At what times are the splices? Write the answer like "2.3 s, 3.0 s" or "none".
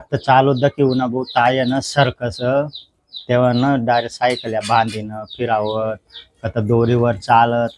none